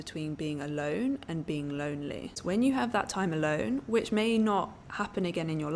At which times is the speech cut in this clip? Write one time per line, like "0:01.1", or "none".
0:02.4